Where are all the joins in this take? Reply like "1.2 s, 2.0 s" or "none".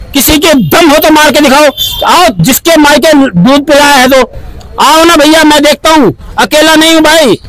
none